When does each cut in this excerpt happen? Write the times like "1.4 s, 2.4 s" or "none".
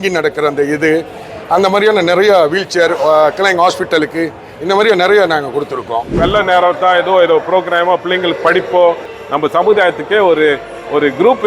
6.2 s, 9.1 s